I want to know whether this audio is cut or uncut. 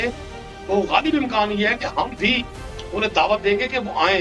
uncut